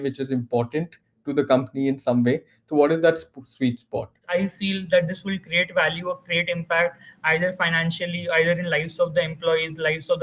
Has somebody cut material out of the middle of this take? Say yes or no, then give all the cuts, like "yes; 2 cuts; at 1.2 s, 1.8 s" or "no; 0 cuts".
yes; 1 cut; at 4.2 s